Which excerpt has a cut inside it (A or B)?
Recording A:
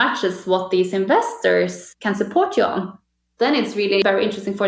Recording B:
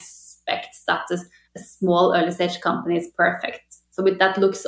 A